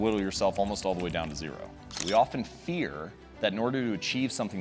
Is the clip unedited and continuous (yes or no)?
no